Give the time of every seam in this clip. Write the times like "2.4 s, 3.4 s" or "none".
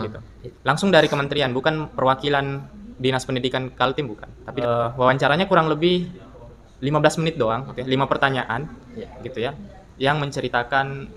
4.6 s, 7.7 s